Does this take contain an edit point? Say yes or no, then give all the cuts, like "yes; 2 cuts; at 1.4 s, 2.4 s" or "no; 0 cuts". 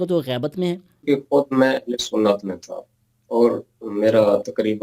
yes; 1 cut; at 1.0 s